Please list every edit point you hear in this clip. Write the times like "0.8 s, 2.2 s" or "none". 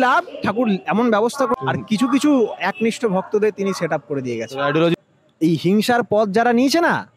1.5 s, 4.9 s